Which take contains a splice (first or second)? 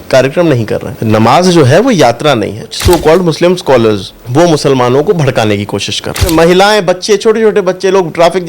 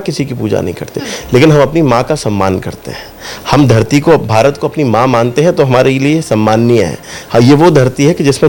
first